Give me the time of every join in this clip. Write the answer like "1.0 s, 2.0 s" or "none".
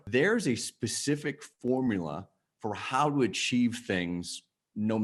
none